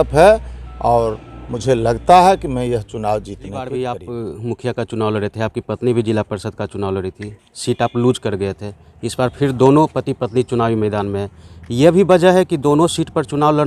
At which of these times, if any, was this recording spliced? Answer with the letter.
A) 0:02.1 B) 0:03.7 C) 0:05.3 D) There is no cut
B